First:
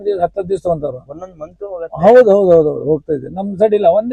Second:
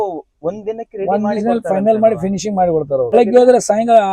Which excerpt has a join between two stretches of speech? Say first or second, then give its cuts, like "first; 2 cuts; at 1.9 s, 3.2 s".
second; 1 cut; at 3.1 s